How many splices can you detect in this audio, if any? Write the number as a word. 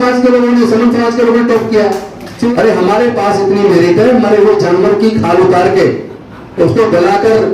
one